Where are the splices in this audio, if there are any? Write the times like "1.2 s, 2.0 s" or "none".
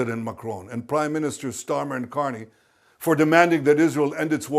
none